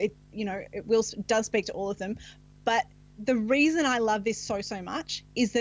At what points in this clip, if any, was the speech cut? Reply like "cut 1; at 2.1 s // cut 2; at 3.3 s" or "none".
cut 1; at 3.0 s